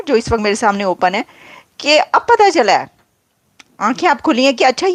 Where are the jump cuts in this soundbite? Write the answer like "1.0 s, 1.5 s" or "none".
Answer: none